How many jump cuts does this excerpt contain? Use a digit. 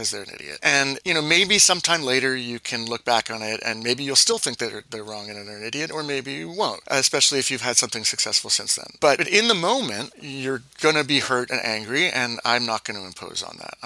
0